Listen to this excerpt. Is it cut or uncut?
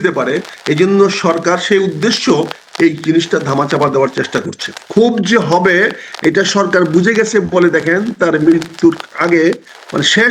cut